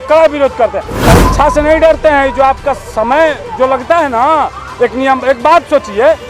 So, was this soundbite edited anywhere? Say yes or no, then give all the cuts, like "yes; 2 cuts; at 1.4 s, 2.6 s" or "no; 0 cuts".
yes; 1 cut; at 1.0 s